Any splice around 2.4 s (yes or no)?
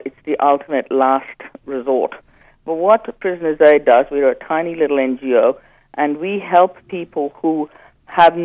yes